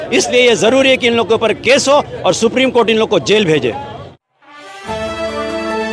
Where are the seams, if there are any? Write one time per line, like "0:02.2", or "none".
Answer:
none